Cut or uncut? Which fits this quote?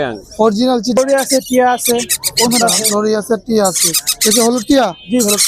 cut